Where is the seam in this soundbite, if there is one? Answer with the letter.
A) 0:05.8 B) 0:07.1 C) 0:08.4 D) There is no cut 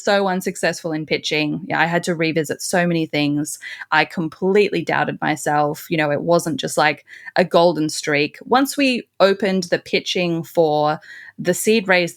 D